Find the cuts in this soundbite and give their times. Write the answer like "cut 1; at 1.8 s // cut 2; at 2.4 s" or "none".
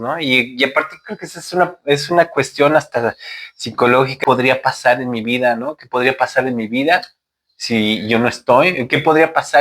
cut 1; at 4.1 s